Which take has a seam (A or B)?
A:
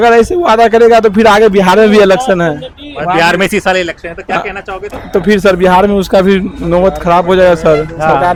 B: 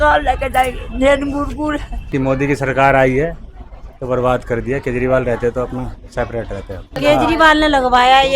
B